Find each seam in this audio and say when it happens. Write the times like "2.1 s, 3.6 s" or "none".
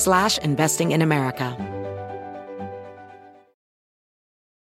1.5 s